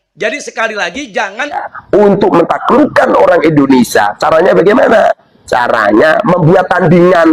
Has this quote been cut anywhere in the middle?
yes; 1 cut; at 1.7 s

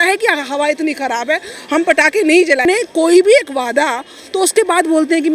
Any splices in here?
yes; 1 cut; at 2.6 s

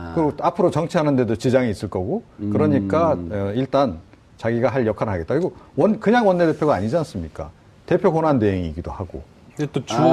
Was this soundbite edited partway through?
no; 0 cuts

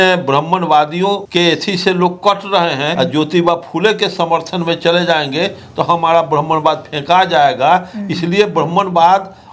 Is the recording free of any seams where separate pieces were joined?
no; 2 cuts; at 1.2 s, 2.9 s

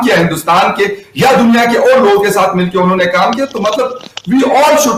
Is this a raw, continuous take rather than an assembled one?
yes; 0 cuts

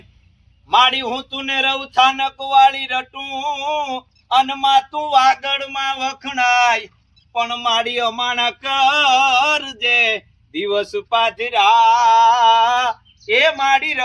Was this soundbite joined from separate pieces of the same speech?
no; 0 cuts

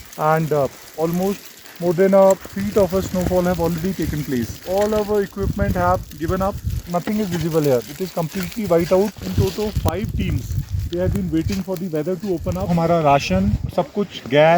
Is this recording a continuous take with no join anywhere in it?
no; 4 cuts; at 6.9 s, 9.1 s, 12.7 s, 13.7 s

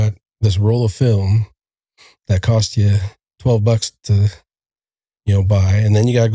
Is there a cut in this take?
no; 0 cuts

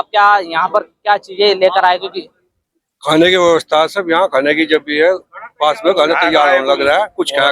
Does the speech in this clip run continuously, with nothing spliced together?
yes; 0 cuts

